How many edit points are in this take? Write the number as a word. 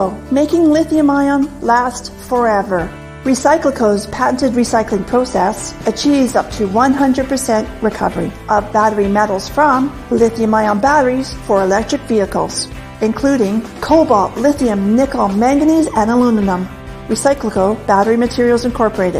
one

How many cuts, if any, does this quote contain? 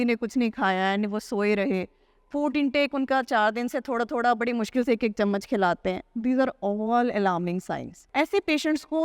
one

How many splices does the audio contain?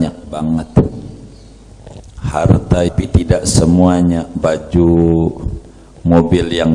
one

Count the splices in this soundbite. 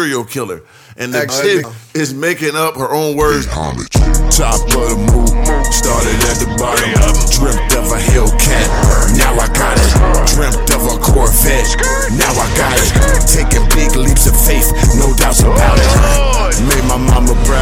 one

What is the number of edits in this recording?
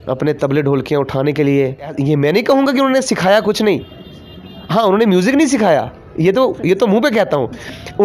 one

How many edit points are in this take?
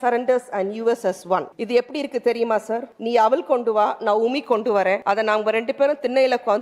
three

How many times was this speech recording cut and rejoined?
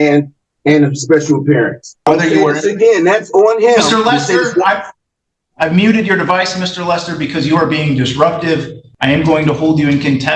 two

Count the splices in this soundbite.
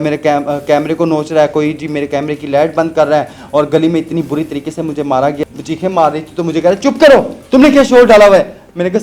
one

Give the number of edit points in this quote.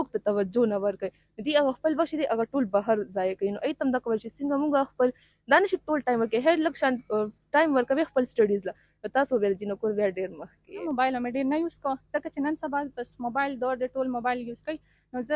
one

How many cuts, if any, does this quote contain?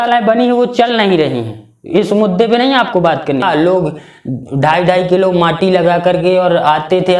one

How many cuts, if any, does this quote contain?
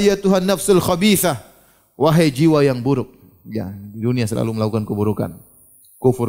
zero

